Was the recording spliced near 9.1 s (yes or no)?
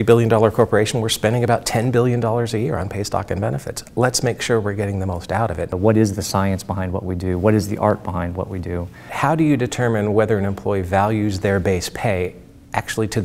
yes